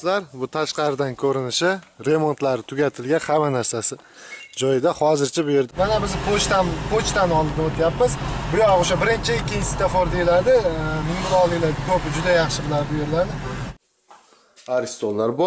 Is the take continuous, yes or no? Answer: no